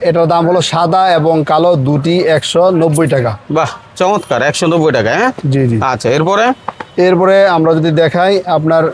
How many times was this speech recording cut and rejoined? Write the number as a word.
zero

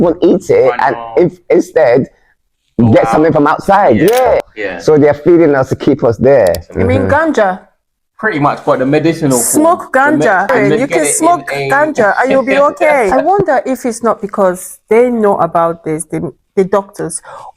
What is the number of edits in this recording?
four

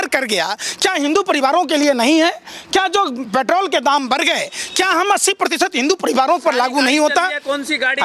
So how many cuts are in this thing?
zero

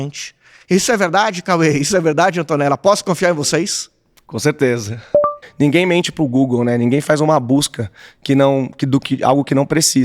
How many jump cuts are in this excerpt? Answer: one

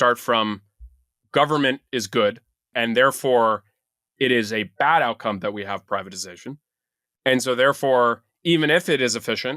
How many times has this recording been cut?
two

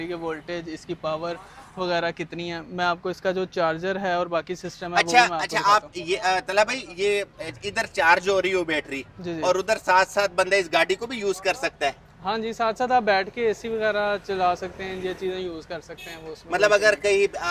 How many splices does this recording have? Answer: zero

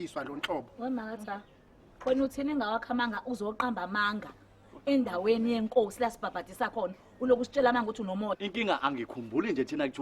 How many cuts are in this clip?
one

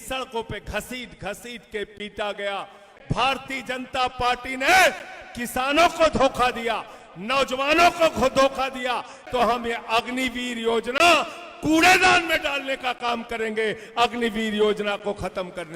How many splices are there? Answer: two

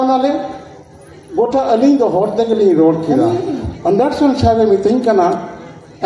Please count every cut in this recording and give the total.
one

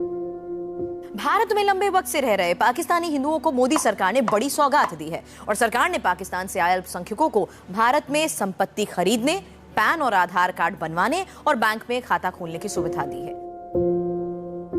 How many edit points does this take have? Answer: one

